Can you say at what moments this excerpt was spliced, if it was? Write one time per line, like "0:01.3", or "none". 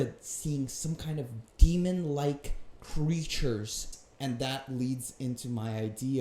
0:03.9